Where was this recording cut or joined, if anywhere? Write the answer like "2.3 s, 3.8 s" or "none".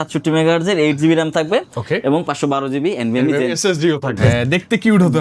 4.2 s